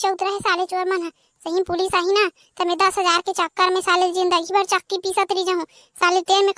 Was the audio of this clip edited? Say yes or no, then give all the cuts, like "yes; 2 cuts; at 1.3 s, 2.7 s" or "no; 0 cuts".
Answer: no; 0 cuts